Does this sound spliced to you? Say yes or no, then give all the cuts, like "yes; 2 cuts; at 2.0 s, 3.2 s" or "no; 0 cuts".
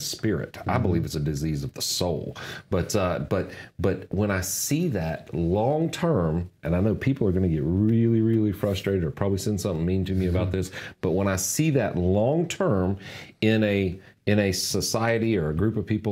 no; 0 cuts